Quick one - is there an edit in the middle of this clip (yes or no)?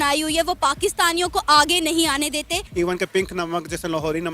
yes